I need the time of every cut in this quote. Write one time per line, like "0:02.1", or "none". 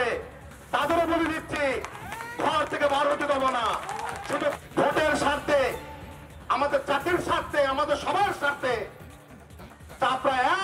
none